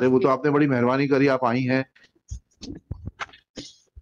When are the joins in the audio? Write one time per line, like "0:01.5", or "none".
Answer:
none